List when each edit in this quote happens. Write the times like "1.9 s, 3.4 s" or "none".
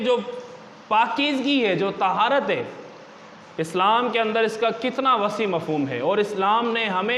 none